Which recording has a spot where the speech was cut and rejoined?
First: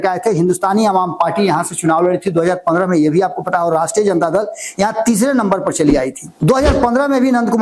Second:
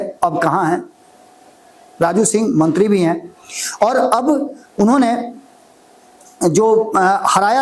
first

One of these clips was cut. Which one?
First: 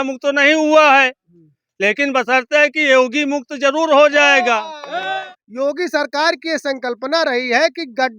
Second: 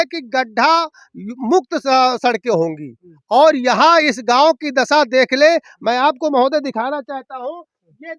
first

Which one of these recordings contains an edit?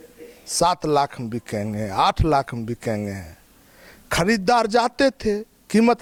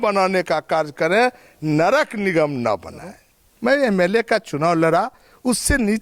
second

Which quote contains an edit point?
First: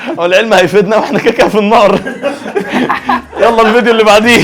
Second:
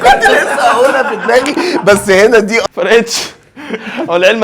second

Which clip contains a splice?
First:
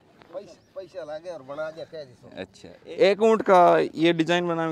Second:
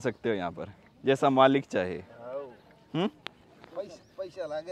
first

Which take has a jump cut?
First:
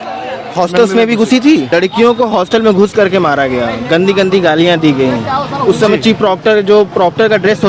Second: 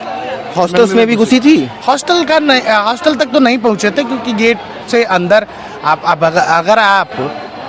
first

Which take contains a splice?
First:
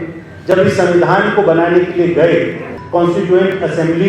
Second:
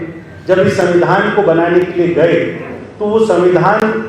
first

